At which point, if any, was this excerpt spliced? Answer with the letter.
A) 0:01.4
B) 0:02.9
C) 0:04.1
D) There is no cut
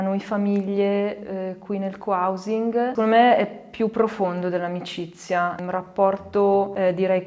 D